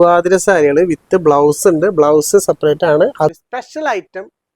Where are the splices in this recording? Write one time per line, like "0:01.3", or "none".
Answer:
0:03.3